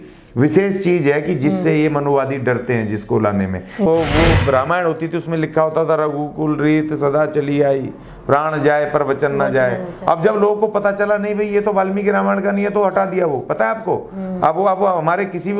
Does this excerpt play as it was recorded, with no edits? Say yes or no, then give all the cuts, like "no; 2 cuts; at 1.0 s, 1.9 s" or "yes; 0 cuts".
no; 1 cut; at 3.9 s